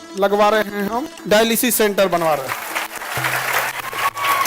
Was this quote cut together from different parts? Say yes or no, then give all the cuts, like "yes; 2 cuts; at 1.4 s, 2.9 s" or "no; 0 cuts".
yes; 1 cut; at 1.1 s